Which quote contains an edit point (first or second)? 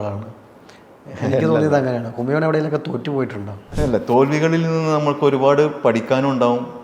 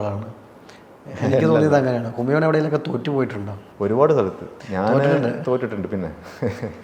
first